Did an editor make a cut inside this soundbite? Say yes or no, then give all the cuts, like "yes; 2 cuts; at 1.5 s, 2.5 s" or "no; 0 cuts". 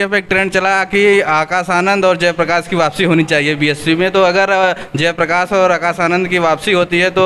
no; 0 cuts